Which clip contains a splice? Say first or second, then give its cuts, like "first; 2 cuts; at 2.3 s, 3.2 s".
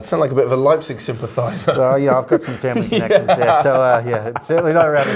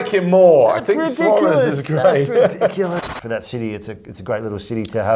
second; 1 cut; at 3.0 s